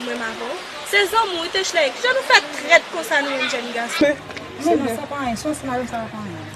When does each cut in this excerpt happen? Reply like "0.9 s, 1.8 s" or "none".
4.0 s